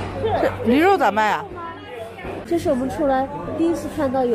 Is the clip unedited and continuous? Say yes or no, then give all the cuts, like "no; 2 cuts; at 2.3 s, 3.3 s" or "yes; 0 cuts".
no; 1 cut; at 2.3 s